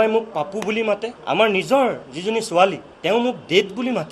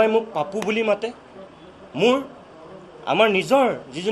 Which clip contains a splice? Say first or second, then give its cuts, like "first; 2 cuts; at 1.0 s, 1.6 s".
first; 2 cuts; at 1.1 s, 2.9 s